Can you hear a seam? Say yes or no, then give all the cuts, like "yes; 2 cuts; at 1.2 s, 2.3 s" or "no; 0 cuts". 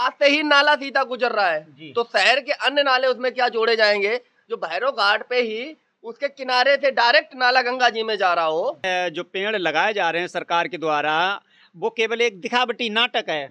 yes; 1 cut; at 8.8 s